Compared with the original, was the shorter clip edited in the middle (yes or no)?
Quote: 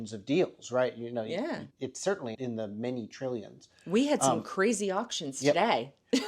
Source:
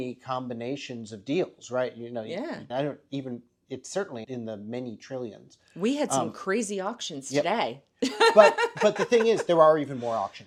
yes